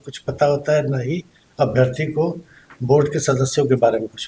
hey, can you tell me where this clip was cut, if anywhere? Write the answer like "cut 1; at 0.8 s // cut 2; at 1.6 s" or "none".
none